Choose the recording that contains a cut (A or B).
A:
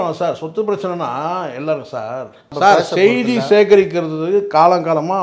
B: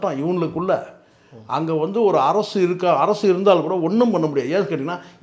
A